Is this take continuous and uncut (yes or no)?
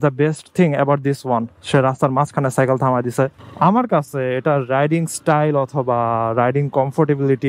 no